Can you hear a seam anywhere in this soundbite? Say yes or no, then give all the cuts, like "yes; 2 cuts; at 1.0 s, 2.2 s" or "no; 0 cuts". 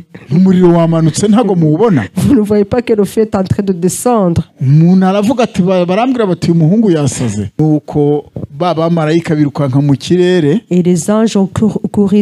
yes; 1 cut; at 7.5 s